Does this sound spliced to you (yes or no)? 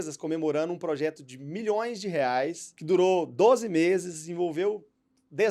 yes